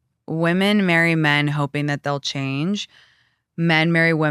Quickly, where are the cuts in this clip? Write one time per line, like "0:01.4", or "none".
none